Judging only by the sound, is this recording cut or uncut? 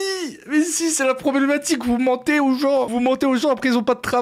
cut